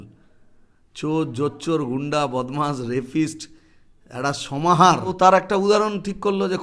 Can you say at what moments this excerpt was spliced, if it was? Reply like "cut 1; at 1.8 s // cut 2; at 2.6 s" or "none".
cut 1; at 5.1 s